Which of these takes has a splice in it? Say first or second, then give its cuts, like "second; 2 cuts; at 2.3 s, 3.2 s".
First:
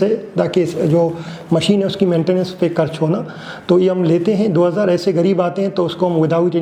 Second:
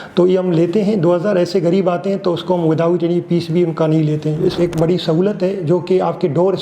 second; 1 cut; at 4.5 s